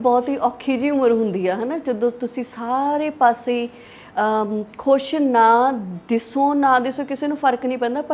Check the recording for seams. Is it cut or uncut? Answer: uncut